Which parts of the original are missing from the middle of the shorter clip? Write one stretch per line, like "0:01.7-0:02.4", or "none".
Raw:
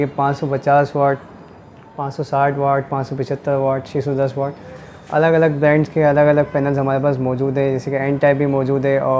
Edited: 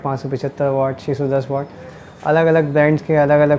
none